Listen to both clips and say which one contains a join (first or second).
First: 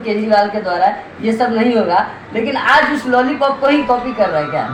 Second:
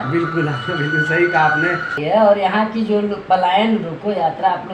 second